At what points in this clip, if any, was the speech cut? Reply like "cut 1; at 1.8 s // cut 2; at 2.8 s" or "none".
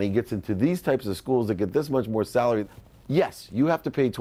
cut 1; at 2.6 s